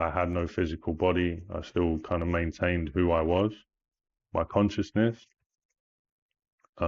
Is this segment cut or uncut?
uncut